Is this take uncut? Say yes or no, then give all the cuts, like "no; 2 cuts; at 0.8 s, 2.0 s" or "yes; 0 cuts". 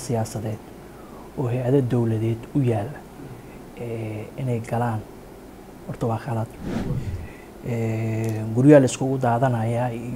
yes; 0 cuts